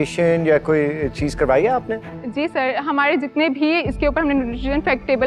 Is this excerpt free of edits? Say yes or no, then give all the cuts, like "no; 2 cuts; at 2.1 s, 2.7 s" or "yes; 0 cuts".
yes; 0 cuts